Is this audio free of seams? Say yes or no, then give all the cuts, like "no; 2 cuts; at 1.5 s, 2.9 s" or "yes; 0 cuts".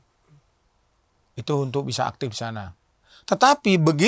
no; 1 cut; at 3.1 s